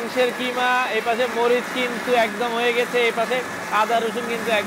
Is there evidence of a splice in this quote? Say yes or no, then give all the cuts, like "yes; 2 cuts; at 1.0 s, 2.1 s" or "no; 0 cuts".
no; 0 cuts